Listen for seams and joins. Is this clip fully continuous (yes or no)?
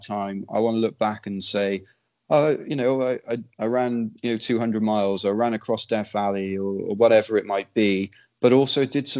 yes